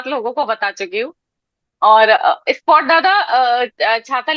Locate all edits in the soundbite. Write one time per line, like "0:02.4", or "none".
none